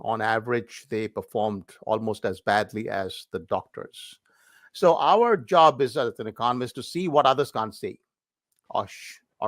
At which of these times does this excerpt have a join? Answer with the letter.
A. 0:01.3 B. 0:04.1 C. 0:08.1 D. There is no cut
B